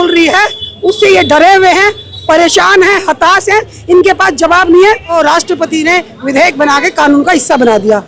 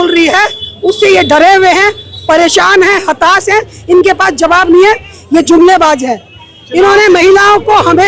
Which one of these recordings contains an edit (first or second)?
first